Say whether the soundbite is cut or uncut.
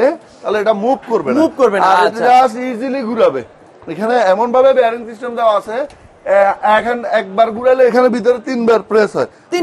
uncut